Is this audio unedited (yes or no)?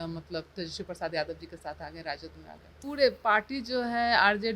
no